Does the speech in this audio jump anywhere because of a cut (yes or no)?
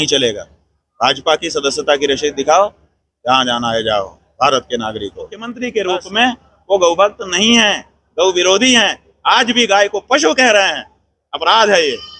yes